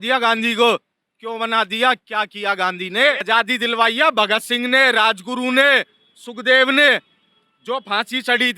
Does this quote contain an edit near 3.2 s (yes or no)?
yes